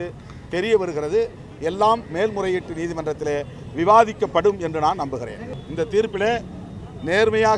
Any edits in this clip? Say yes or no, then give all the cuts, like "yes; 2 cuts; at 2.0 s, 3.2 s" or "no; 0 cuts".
yes; 1 cut; at 5.5 s